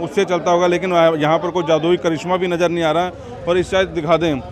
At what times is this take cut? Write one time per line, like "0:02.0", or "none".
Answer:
none